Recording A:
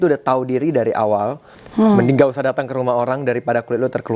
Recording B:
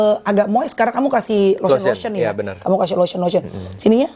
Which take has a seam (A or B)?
A